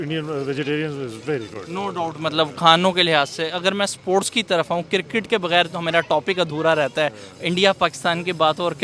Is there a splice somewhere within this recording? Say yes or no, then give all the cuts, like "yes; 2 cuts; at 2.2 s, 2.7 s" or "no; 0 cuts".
no; 0 cuts